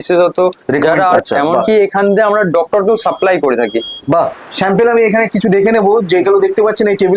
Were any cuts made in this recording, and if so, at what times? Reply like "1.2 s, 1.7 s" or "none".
1.2 s, 4.4 s